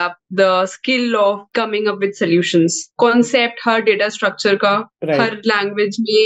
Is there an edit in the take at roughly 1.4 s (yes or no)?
no